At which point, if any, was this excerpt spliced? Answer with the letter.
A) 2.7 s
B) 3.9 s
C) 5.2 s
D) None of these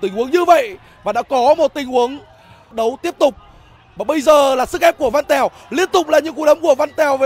A